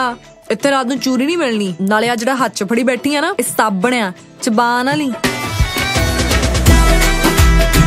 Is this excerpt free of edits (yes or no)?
yes